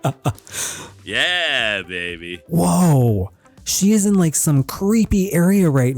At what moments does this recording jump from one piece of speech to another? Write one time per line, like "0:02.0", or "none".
0:02.4